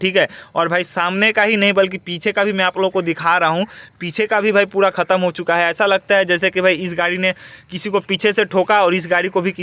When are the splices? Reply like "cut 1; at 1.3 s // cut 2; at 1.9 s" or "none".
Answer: none